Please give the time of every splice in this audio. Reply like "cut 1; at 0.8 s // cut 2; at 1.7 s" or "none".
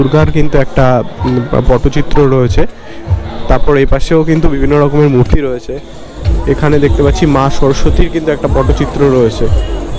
none